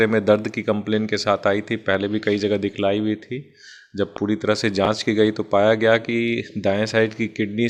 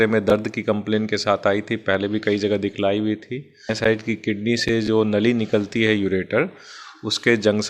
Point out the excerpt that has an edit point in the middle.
second; 1 cut; at 3.7 s

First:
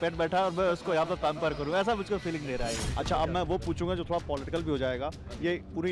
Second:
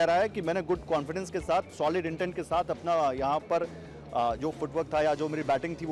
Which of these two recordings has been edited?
first; 1 cut; at 2.9 s

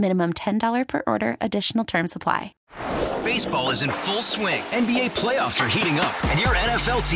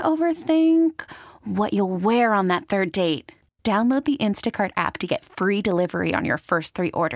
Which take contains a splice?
first; 1 cut; at 2.5 s

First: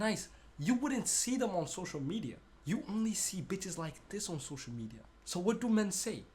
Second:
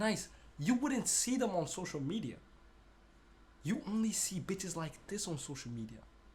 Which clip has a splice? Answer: first; 2 cuts; at 2.5 s, 5.1 s

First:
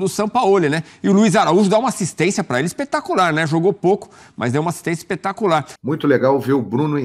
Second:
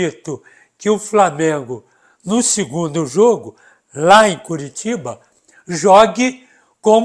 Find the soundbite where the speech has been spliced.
first; 1 cut; at 5.7 s

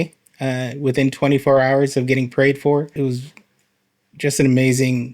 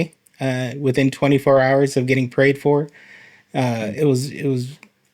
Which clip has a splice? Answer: first; 1 cut; at 2.9 s

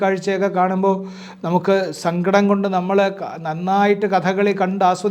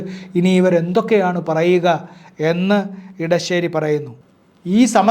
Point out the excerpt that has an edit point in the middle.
second; 1 cut; at 4.2 s

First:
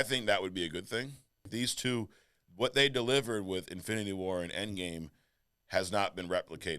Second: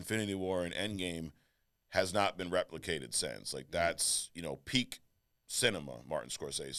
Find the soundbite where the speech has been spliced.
first; 1 cut; at 1.5 s

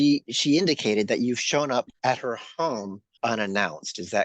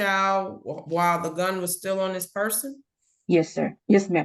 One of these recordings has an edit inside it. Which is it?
first; 2 cuts; at 1.9 s, 3.0 s

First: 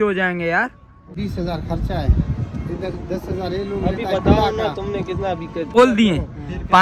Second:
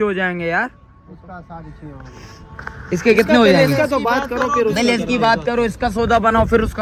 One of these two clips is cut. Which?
first; 2 cuts; at 1.2 s, 5.8 s

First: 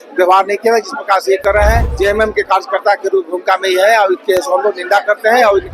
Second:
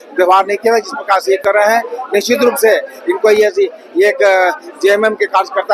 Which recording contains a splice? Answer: first; 1 cut; at 1.9 s

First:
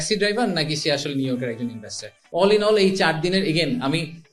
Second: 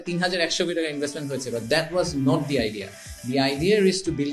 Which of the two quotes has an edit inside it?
first; 1 cut; at 2.2 s

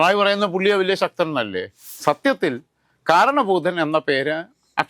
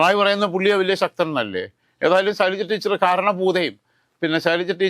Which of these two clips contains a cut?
first; 1 cut; at 1.8 s

